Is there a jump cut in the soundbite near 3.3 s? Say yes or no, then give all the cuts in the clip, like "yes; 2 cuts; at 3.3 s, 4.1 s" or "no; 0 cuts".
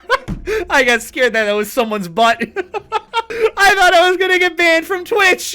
yes; 1 cut; at 3.3 s